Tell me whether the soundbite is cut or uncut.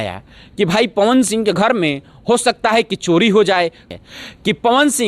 cut